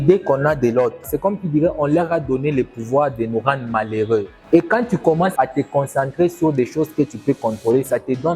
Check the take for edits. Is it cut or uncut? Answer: cut